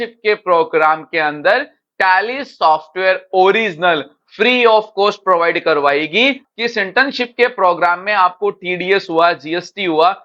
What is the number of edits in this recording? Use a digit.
1